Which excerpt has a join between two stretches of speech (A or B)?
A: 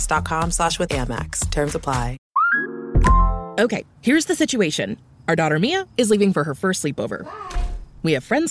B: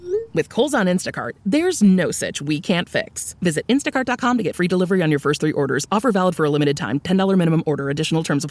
A